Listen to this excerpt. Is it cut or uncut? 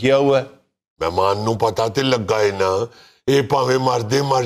uncut